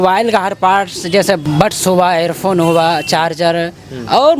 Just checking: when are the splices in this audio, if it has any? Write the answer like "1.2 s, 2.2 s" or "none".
1.4 s